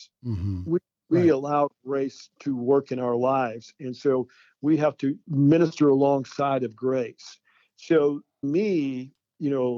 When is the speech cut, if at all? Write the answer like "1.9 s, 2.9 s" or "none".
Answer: 5.2 s, 8.4 s